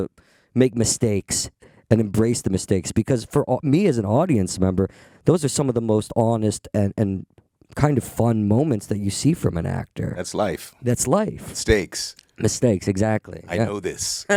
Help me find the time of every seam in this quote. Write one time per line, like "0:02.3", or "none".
none